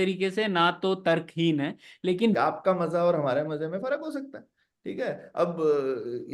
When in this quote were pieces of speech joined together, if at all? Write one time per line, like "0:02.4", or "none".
0:02.4